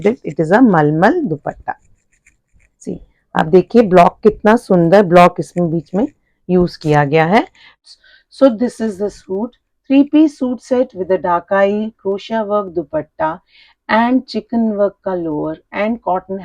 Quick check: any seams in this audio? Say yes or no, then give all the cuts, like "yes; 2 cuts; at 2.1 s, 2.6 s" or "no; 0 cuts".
yes; 1 cut; at 7.8 s